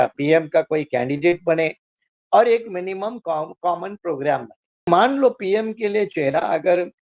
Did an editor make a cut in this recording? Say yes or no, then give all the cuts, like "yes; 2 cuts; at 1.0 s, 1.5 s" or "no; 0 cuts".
yes; 1 cut; at 4.9 s